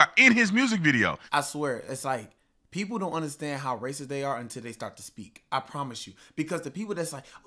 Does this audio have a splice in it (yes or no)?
yes